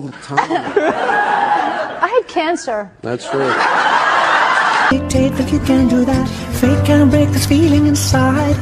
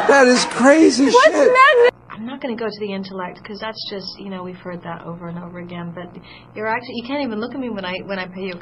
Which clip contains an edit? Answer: first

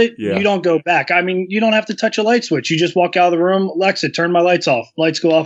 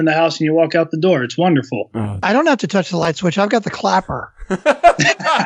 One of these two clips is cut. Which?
second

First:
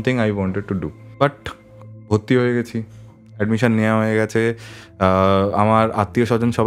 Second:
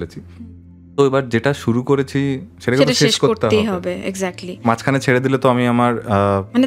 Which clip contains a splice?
first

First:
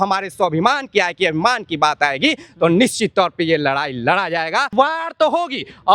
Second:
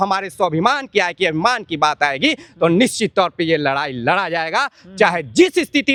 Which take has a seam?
first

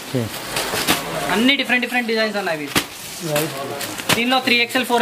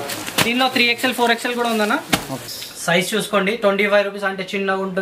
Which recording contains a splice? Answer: second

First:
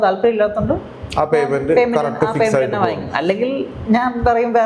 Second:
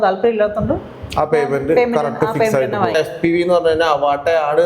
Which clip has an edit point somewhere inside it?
second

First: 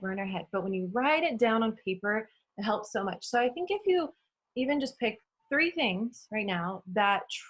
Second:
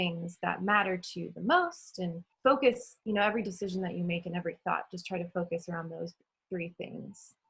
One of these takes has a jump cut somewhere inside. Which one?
second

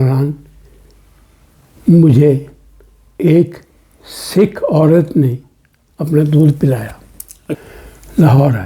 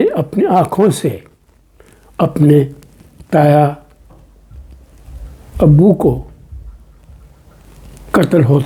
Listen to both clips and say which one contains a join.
first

